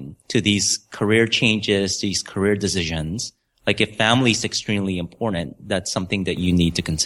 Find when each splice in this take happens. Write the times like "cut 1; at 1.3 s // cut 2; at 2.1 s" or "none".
none